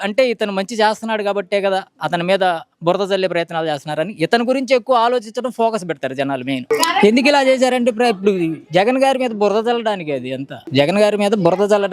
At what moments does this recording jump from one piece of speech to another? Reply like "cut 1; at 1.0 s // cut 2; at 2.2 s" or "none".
cut 1; at 6.6 s